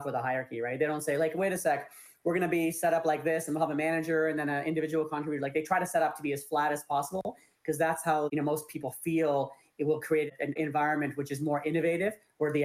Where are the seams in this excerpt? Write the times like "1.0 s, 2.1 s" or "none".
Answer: 8.3 s, 10.5 s